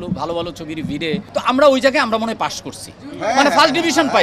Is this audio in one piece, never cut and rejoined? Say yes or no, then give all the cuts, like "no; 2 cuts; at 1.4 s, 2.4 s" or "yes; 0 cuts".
no; 1 cut; at 1.3 s